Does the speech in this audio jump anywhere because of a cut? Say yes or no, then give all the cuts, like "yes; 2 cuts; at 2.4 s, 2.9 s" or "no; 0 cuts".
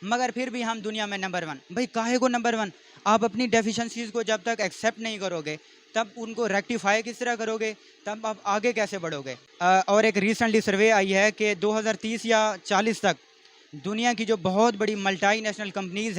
yes; 1 cut; at 9.4 s